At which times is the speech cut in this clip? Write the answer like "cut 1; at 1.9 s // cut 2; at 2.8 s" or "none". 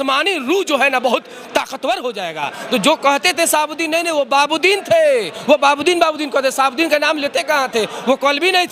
none